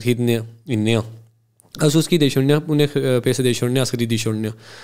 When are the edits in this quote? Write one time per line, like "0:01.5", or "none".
none